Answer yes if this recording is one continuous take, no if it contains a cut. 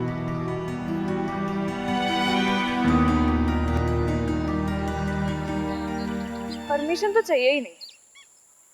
no